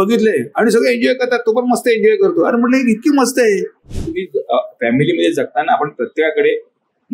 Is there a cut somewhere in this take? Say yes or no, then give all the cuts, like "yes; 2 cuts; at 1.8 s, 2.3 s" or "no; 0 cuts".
yes; 1 cut; at 4.1 s